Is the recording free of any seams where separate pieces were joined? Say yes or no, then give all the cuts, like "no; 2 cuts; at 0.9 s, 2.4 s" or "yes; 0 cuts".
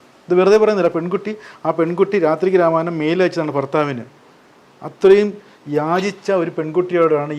yes; 0 cuts